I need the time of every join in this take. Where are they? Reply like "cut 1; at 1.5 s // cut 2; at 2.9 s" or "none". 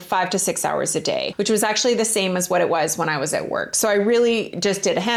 none